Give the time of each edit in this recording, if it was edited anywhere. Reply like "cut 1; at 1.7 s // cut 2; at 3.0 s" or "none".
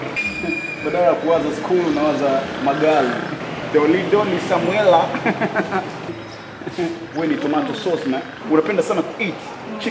cut 1; at 6.0 s